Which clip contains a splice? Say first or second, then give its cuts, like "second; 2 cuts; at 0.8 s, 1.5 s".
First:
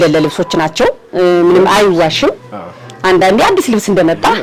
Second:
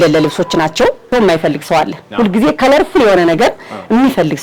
second; 1 cut; at 1.1 s